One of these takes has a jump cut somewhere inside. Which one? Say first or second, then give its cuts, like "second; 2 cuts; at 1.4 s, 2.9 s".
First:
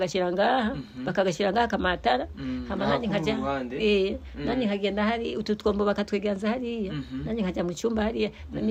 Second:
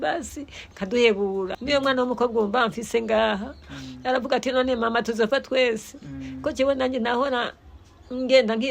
second; 1 cut; at 1.6 s